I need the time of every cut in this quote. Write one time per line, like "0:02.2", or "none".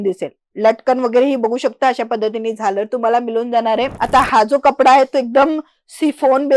0:03.9